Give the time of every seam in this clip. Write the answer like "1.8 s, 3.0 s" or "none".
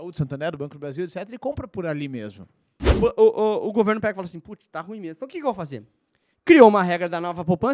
2.8 s